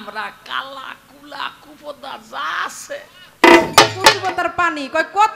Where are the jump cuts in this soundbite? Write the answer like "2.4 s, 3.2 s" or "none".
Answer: 4.2 s